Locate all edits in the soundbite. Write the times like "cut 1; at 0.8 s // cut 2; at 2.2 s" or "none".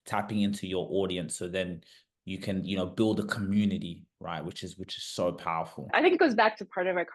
cut 1; at 5.9 s